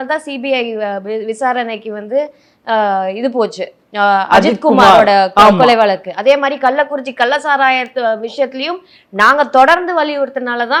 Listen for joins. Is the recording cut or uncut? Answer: uncut